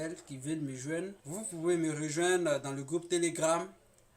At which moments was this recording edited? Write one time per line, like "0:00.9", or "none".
0:01.2